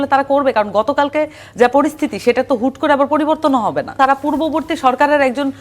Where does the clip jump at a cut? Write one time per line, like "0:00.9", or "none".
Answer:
0:04.0